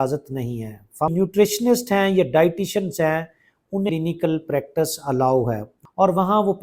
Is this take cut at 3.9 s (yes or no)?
yes